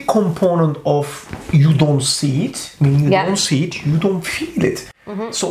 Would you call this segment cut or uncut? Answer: uncut